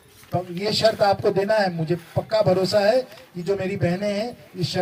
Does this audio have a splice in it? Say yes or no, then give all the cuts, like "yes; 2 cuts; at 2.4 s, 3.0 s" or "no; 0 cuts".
no; 0 cuts